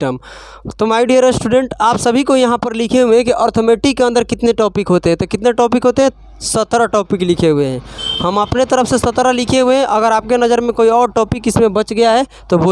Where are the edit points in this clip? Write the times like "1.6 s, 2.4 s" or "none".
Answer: none